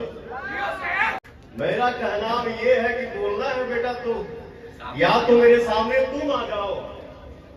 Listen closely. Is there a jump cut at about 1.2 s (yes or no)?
yes